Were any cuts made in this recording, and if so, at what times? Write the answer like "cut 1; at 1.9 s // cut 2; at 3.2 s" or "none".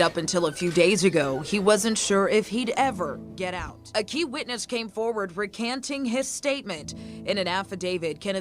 cut 1; at 3.7 s